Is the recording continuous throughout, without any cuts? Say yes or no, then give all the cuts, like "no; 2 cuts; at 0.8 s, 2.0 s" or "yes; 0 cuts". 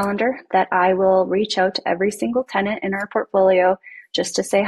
yes; 0 cuts